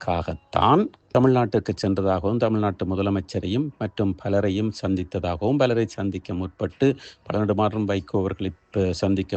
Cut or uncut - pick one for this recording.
uncut